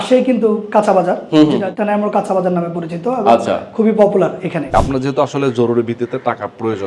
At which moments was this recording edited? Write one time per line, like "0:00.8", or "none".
0:01.7
0:04.7